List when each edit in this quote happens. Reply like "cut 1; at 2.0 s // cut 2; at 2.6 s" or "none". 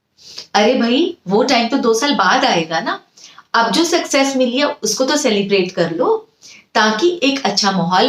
none